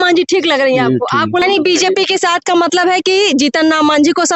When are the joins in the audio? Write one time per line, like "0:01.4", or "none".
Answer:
0:01.4